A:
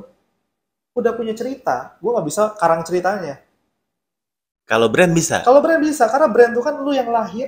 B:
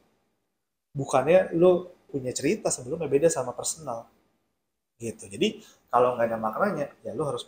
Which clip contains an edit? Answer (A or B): B